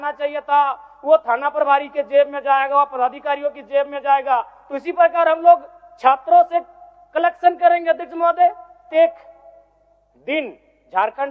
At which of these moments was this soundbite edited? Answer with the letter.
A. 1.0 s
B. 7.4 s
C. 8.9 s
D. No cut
C